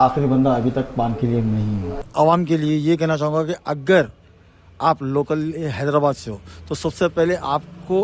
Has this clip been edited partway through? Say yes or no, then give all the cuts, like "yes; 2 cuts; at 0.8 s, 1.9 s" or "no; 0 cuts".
yes; 1 cut; at 2.0 s